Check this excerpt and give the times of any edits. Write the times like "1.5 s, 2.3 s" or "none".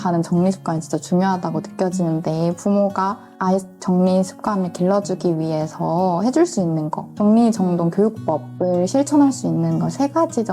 none